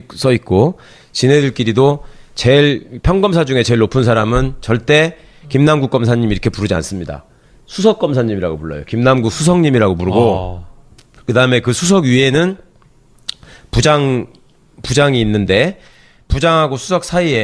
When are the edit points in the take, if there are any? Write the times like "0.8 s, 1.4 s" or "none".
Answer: none